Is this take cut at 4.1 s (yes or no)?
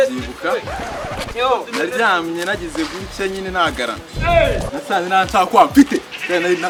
no